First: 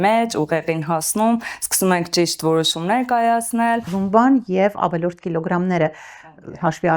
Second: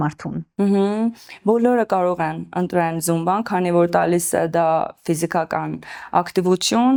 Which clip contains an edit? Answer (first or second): first